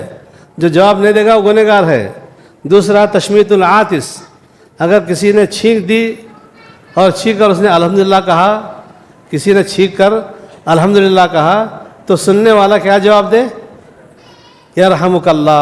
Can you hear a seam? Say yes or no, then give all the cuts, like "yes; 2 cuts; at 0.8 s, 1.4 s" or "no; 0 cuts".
no; 0 cuts